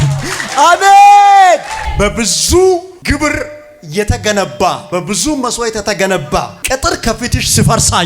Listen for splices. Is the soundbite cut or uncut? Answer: cut